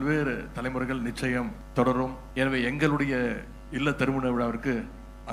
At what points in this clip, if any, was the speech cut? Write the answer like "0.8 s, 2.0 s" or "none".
1.6 s, 2.2 s